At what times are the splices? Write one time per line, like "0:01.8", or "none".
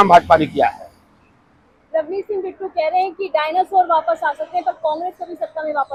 none